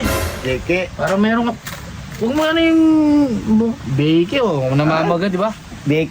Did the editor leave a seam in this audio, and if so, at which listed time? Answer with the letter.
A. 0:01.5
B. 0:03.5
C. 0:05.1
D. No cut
D